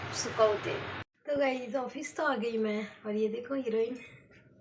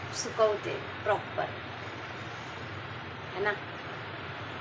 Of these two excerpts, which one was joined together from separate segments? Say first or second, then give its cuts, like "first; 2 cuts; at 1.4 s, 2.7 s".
first; 1 cut; at 0.9 s